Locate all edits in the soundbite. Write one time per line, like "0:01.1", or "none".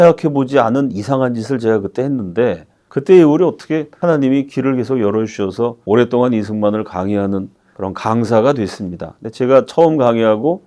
none